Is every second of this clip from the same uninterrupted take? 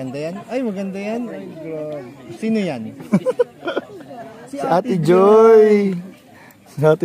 yes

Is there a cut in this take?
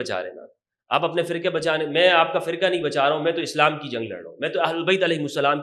no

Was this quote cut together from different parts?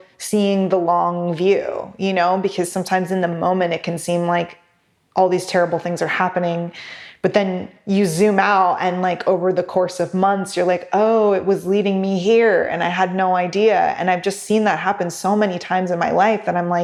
no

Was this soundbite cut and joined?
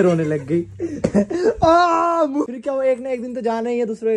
yes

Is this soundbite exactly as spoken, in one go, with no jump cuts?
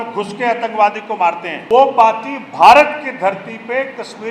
no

